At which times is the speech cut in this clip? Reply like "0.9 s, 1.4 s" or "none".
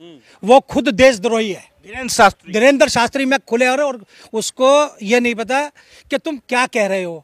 none